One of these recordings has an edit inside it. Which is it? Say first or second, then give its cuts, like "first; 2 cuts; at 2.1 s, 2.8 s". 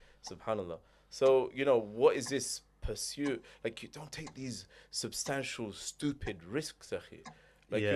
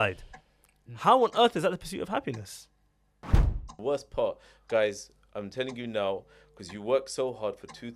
second; 1 cut; at 3.4 s